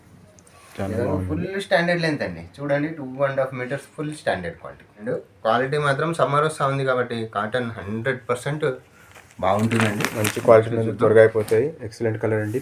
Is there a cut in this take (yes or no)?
yes